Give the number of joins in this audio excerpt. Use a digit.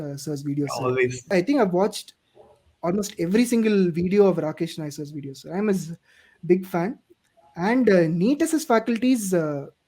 1